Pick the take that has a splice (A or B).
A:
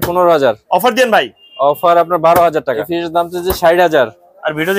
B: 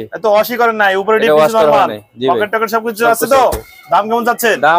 A